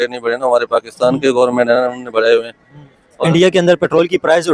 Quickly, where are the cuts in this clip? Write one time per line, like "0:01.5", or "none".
none